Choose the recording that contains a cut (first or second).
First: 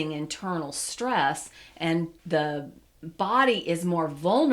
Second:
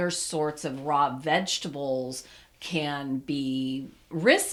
first